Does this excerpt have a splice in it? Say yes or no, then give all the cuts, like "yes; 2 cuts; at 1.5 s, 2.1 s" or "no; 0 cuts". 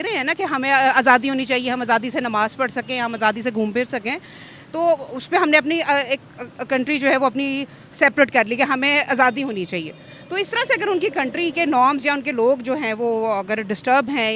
no; 0 cuts